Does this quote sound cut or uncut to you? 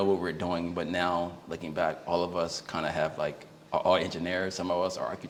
uncut